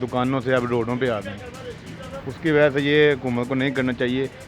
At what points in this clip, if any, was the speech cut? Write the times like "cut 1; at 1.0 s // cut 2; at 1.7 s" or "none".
none